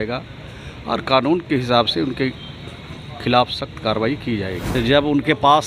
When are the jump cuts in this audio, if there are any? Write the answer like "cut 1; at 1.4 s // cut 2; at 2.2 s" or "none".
cut 1; at 4.7 s